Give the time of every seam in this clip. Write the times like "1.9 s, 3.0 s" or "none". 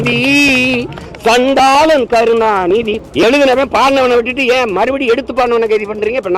3.0 s